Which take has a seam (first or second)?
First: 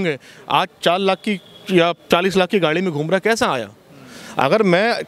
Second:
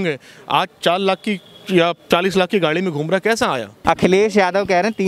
second